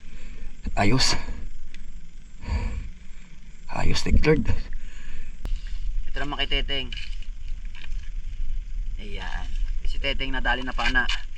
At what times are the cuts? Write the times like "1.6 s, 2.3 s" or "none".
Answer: 5.4 s